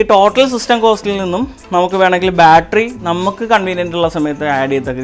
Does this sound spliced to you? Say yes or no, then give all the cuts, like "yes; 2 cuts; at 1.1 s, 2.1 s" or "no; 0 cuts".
no; 0 cuts